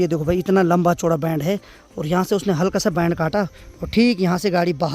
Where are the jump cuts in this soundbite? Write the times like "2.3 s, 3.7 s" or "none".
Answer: none